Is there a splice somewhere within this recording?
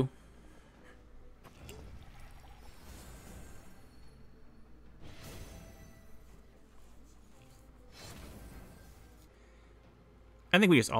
yes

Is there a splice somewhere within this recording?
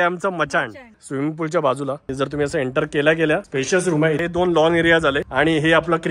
yes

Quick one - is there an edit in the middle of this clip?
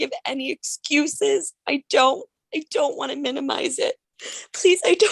yes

